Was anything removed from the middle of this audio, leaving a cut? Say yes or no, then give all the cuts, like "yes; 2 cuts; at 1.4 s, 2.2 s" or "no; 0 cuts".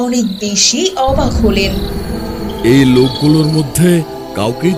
no; 0 cuts